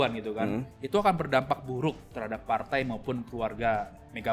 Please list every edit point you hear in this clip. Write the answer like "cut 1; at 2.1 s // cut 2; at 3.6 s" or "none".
none